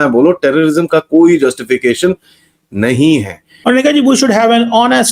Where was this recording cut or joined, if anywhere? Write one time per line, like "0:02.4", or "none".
0:03.4